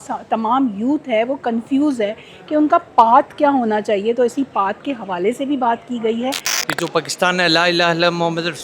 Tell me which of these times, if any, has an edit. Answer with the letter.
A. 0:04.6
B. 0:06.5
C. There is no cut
B